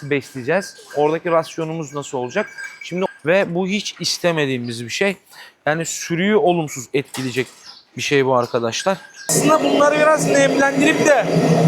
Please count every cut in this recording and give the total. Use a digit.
2